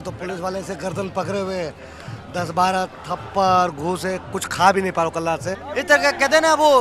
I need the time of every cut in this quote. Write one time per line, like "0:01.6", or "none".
0:05.6